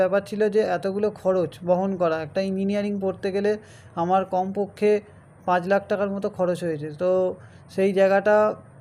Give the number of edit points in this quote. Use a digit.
0